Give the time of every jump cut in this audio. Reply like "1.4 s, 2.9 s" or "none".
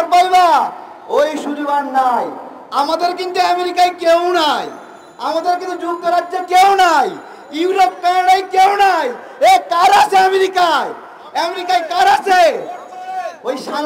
none